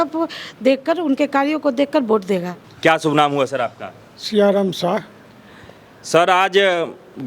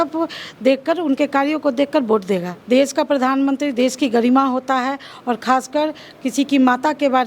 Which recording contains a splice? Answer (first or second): second